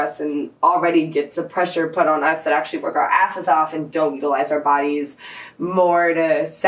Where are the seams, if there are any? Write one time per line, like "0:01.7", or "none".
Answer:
none